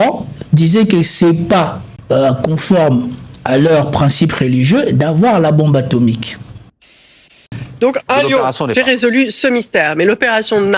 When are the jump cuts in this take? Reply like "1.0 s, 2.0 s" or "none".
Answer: 1.9 s, 7.2 s